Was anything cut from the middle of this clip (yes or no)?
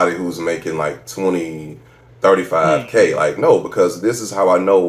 no